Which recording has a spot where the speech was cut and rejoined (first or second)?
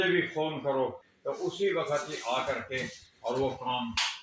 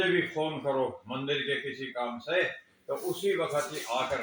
first